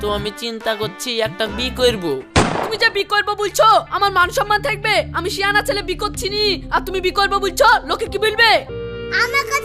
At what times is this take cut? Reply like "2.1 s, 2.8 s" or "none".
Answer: 2.4 s, 8.7 s